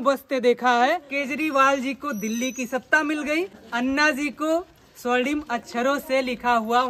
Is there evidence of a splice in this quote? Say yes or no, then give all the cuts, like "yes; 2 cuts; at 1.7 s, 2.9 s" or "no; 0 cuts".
yes; 2 cuts; at 1.1 s, 3.6 s